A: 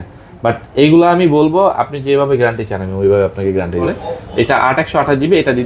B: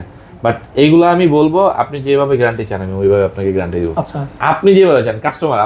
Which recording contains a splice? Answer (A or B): A